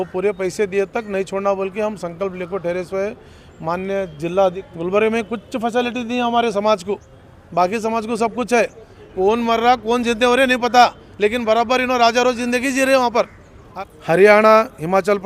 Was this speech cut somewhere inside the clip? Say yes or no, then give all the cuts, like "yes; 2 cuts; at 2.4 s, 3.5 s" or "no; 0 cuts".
yes; 3 cuts; at 4.6 s, 9.1 s, 13.7 s